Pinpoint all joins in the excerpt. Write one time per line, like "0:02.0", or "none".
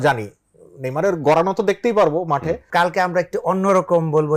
0:02.6